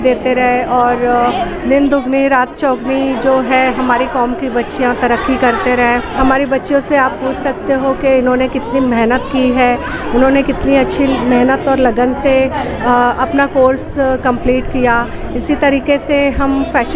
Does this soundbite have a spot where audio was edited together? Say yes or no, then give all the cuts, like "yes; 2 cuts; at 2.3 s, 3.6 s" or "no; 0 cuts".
no; 0 cuts